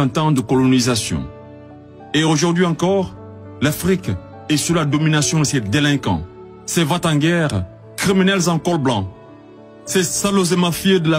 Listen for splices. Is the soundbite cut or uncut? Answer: uncut